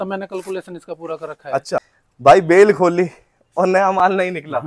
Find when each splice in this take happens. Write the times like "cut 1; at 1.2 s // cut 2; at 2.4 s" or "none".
cut 1; at 2.0 s